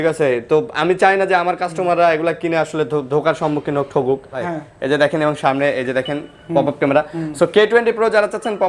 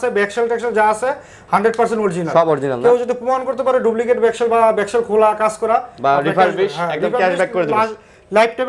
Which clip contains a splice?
first; 1 cut; at 4.4 s

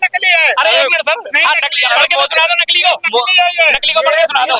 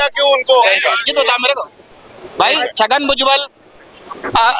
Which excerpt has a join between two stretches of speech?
second; 1 cut; at 1.0 s

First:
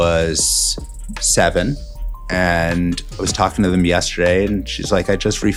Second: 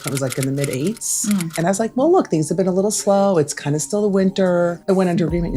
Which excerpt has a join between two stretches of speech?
second; 2 cuts; at 1.5 s, 4.8 s

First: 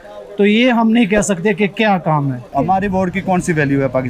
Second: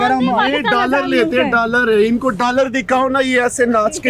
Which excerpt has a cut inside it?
first; 1 cut; at 2.4 s

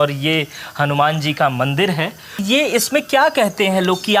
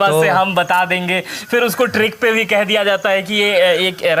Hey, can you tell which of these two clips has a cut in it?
first; 1 cut; at 2.4 s

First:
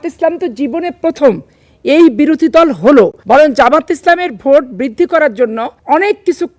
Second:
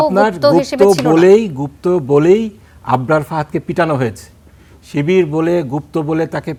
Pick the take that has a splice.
first; 2 cuts; at 3.2 s, 5.7 s

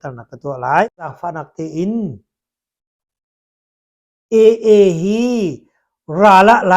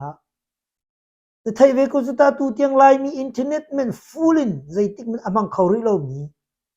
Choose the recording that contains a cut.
first; 1 cut; at 1.1 s

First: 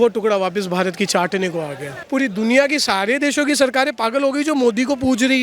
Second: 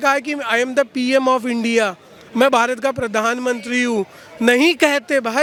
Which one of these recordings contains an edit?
first; 1 cut; at 2.0 s

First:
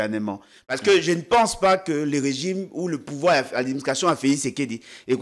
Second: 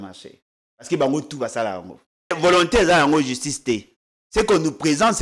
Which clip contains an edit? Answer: second; 1 cut; at 2.4 s

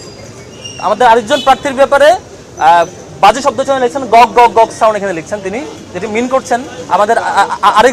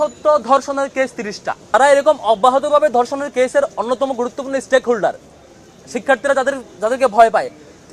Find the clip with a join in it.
second; 1 cut; at 1.7 s

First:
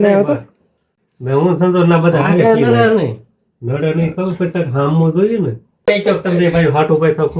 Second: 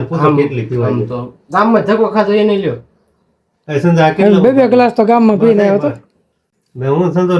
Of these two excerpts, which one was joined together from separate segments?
first; 1 cut; at 5.9 s

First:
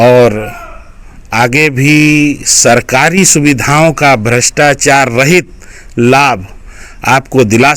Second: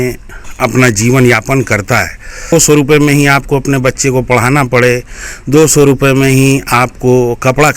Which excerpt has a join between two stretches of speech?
second; 1 cut; at 2.5 s

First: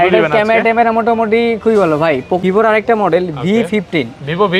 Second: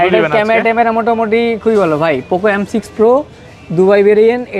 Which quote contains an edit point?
first; 1 cut; at 2.4 s

